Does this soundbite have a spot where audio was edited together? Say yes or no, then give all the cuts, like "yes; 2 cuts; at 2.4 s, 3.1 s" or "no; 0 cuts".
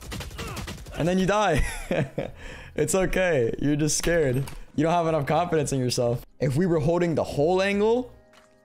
yes; 2 cuts; at 4.6 s, 6.3 s